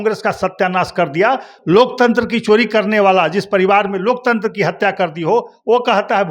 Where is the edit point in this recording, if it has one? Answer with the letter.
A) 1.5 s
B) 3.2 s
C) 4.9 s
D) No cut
D